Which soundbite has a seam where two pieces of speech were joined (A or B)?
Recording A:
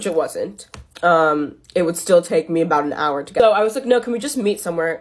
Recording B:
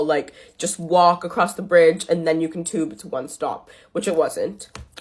A